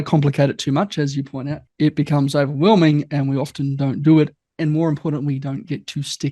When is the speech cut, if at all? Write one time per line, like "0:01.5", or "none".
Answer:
0:01.6